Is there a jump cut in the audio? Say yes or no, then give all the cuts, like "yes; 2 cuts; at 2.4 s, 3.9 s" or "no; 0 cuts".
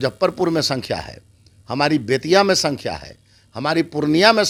no; 0 cuts